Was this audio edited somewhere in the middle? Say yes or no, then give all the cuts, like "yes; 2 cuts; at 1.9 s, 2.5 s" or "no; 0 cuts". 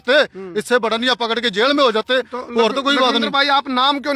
no; 0 cuts